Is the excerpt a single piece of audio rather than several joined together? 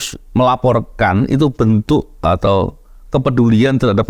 yes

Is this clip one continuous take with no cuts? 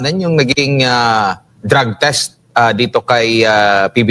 no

